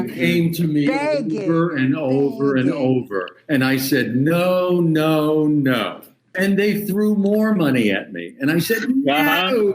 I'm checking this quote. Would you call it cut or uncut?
cut